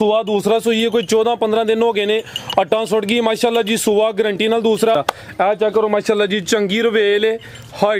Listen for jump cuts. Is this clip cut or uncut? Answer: cut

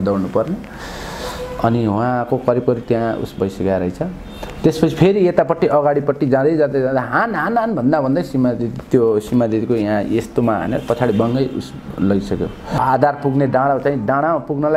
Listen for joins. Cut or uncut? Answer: cut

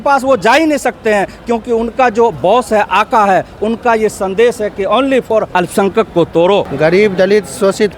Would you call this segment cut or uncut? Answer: cut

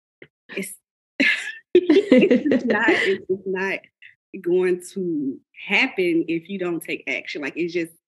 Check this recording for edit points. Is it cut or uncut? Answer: uncut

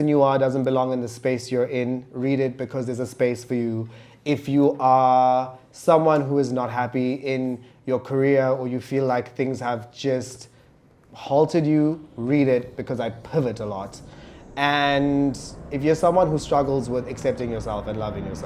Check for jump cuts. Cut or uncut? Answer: uncut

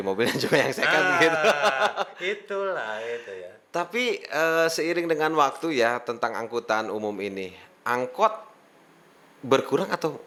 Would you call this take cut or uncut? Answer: uncut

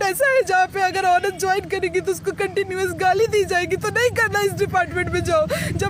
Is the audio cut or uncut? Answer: uncut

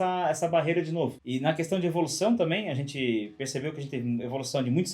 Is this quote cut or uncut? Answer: cut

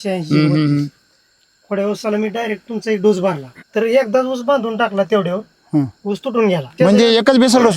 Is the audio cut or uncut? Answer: cut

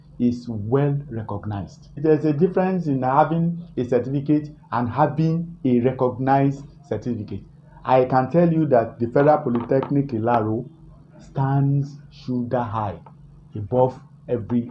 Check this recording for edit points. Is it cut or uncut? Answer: cut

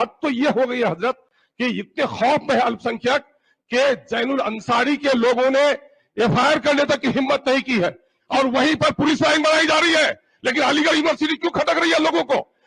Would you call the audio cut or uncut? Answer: cut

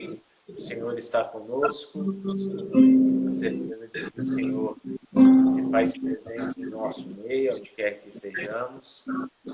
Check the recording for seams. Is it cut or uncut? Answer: cut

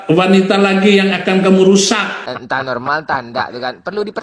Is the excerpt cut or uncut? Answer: cut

